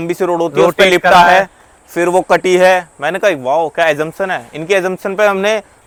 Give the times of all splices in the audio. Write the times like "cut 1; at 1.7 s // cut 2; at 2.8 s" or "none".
none